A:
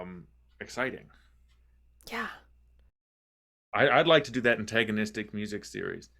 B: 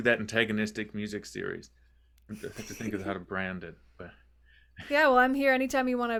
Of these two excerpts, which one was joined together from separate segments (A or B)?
A